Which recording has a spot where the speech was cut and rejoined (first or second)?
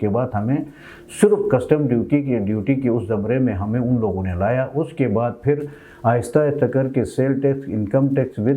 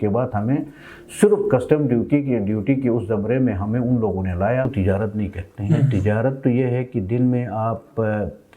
second